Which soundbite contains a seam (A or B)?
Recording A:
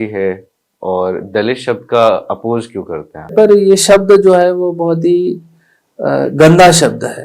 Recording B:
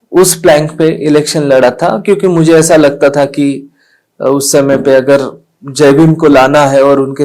A